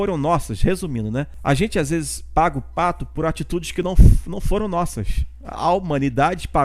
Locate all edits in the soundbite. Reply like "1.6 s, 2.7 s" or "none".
1.3 s